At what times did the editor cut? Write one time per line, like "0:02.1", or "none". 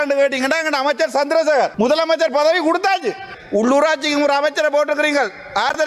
0:01.7
0:03.3